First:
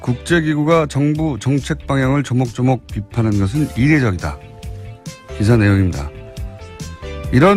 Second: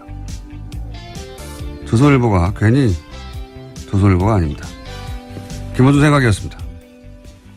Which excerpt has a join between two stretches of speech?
second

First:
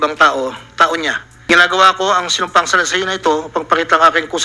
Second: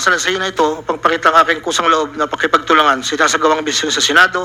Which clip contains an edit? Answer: first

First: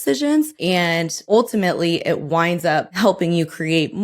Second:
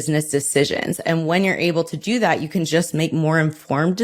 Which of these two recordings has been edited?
first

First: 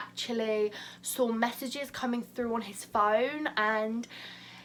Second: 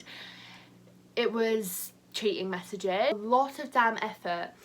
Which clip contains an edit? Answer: second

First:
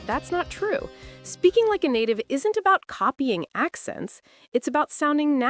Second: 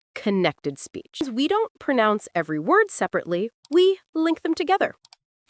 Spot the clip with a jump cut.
second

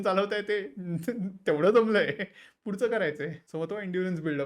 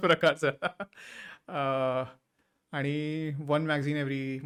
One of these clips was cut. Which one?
first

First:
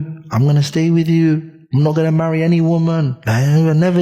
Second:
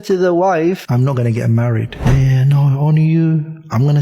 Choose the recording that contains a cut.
second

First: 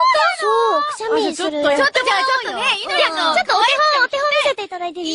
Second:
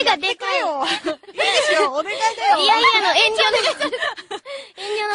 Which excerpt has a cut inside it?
first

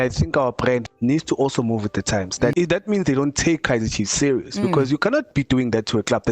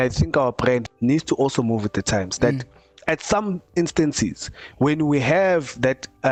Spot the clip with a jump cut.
first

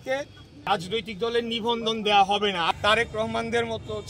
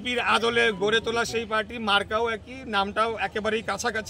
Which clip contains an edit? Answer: first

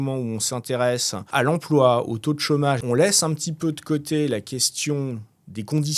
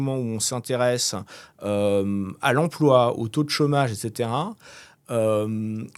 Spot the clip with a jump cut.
first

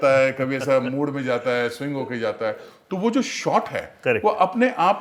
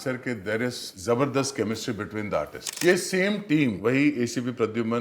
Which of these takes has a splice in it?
second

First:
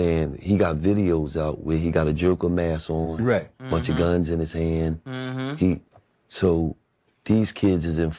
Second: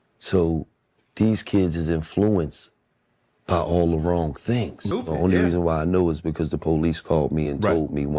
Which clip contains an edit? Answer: second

